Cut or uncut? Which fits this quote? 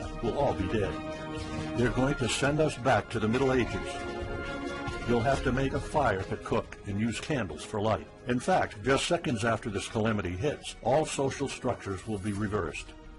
uncut